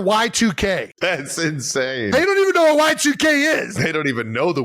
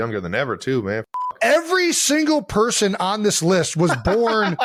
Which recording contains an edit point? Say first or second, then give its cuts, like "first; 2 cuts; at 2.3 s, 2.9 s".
first; 2 cuts; at 0.9 s, 3.7 s